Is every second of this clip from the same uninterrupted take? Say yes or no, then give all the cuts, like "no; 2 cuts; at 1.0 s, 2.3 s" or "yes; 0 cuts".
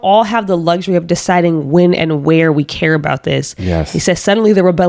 yes; 0 cuts